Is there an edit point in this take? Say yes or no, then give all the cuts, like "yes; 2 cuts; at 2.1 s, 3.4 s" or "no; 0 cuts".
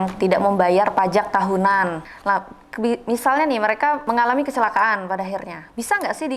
yes; 2 cuts; at 2.1 s, 4.0 s